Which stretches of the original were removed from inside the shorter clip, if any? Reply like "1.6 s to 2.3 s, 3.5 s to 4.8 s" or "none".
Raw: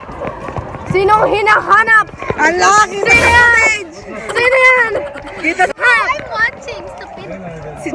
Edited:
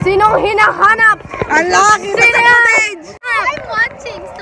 4.2 s to 5.9 s